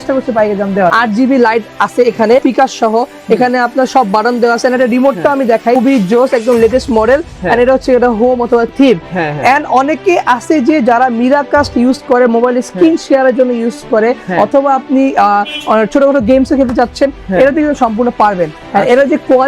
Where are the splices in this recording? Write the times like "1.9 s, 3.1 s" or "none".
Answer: 0.9 s, 2.4 s, 5.8 s